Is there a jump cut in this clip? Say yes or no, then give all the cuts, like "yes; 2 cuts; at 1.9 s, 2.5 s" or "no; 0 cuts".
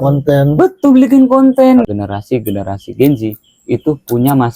yes; 1 cut; at 1.8 s